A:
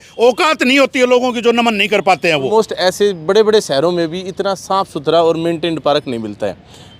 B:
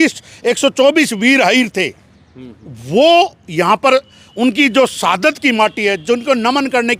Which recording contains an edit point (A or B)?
A